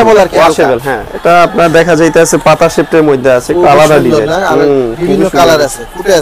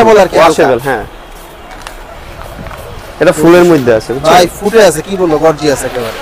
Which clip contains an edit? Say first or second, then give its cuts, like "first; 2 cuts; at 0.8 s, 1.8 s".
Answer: first; 1 cut; at 1.1 s